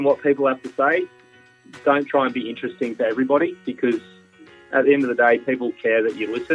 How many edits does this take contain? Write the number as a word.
zero